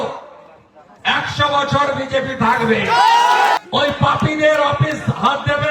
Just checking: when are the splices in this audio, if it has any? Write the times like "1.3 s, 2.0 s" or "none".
3.6 s